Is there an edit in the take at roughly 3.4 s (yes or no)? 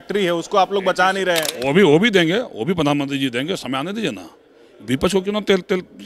no